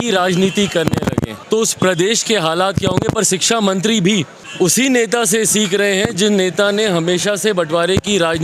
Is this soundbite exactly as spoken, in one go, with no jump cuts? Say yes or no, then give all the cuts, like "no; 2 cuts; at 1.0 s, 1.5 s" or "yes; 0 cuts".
no; 2 cuts; at 1.4 s, 4.4 s